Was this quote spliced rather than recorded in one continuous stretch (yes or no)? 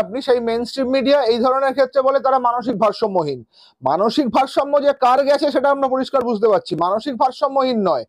no